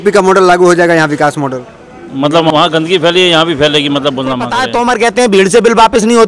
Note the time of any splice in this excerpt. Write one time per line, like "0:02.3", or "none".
0:02.5
0:04.6